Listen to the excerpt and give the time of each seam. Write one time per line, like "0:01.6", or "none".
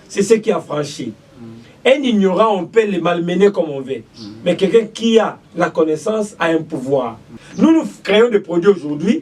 0:07.4

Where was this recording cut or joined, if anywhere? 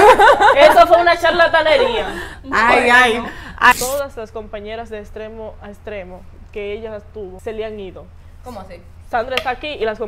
0:03.7
0:07.4

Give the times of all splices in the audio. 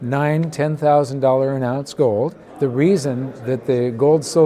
0:02.4

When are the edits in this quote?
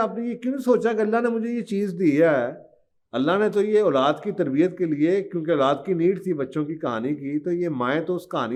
none

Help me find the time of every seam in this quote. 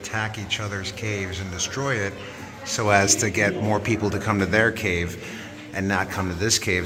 none

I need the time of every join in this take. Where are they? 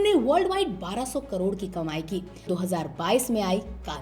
0:02.5

